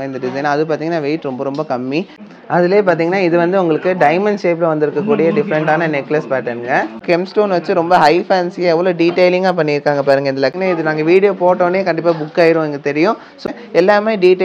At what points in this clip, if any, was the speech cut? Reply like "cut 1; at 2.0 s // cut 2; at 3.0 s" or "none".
cut 1; at 2.2 s // cut 2; at 7.0 s // cut 3; at 10.6 s // cut 4; at 13.4 s

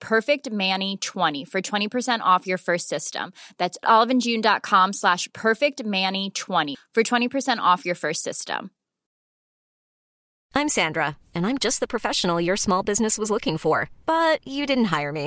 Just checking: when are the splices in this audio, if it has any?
cut 1; at 1.3 s

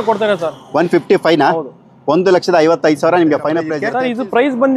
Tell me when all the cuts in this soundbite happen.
cut 1; at 3.8 s

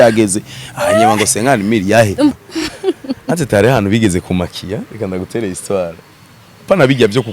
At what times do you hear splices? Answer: cut 1; at 2.3 s

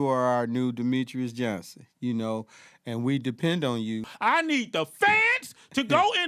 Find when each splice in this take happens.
cut 1; at 4.1 s

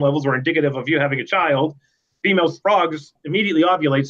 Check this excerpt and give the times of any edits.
cut 1; at 3.1 s

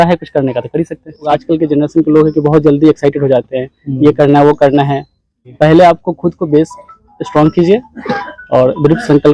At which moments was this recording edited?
cut 1; at 1.3 s // cut 2; at 5.5 s

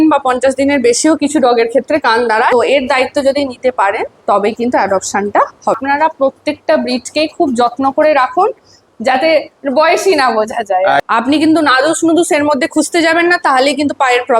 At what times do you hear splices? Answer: cut 1; at 2.5 s // cut 2; at 5.8 s // cut 3; at 11.0 s

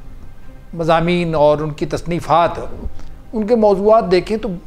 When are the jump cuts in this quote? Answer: none

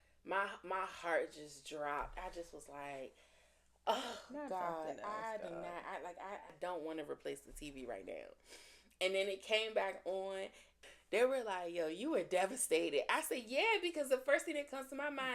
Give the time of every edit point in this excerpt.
cut 1; at 6.5 s // cut 2; at 10.7 s

